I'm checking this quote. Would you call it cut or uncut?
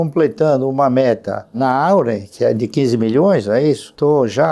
uncut